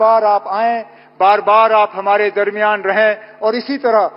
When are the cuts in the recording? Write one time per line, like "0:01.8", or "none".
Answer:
none